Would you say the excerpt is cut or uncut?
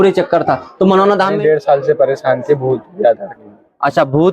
cut